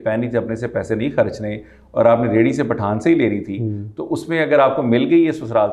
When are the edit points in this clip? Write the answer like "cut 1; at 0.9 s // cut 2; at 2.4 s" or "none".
none

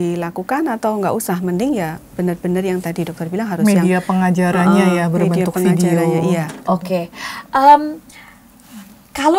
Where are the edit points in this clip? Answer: none

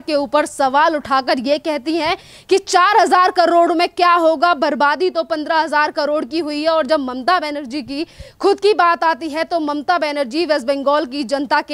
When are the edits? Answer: none

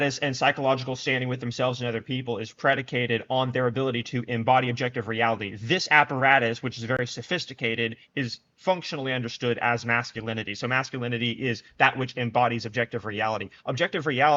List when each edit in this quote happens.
none

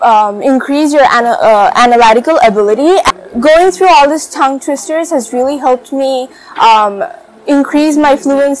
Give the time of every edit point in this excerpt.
cut 1; at 3.1 s

